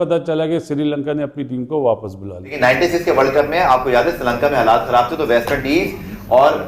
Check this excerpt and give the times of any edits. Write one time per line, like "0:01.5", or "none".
0:02.5